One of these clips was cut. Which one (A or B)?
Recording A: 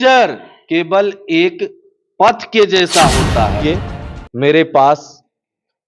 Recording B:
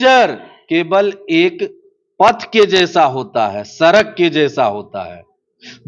A